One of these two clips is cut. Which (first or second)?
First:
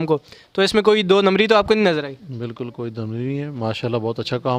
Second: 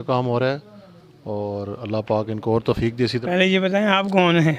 second